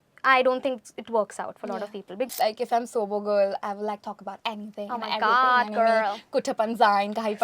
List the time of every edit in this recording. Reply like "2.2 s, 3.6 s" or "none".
2.3 s